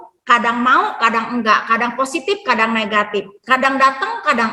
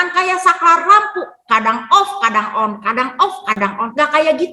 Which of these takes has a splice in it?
second; 1 cut; at 3.5 s

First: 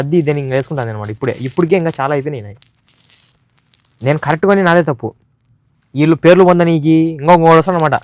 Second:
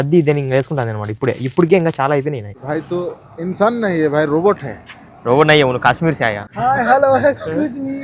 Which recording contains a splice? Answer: second; 2 cuts; at 2.5 s, 6.5 s

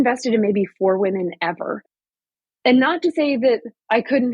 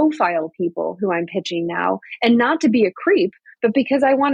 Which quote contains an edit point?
first; 1 cut; at 1.9 s

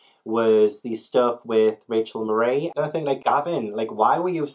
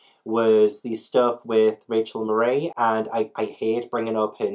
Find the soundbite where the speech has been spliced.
first; 1 cut; at 2.8 s

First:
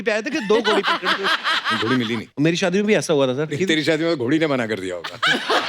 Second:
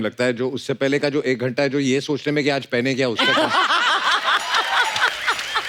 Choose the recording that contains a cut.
first; 2 cuts; at 2.0 s, 3.6 s

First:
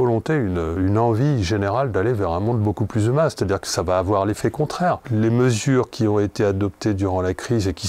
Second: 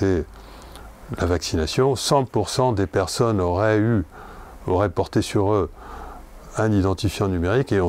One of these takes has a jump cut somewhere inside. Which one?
first; 2 cuts; at 0.8 s, 5.0 s

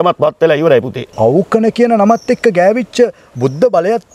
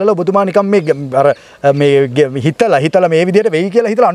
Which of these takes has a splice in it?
first; 1 cut; at 1.1 s

